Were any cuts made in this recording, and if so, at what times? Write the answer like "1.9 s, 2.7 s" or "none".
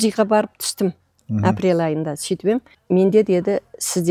none